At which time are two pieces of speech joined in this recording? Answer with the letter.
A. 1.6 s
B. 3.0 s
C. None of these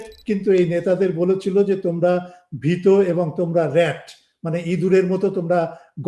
C